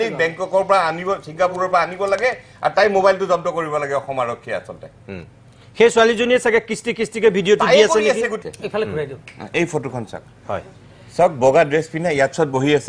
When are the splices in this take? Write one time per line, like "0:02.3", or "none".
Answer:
0:08.4